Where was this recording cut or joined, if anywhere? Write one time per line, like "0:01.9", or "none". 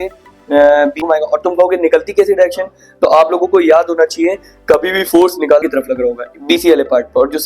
0:01.0
0:05.6